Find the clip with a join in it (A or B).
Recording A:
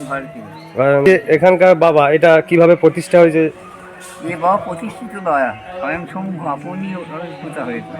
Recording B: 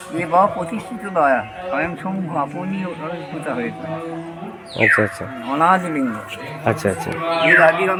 A